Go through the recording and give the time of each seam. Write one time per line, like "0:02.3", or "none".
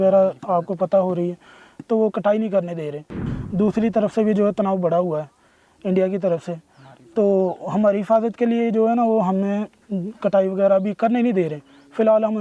0:03.2